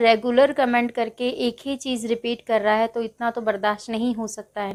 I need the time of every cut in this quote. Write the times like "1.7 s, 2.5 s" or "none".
none